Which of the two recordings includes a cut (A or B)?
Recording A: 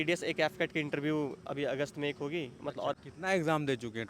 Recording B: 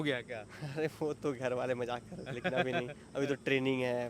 A